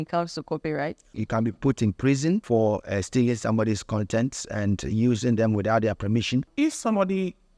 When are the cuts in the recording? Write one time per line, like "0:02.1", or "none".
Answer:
0:01.1
0:02.4
0:06.5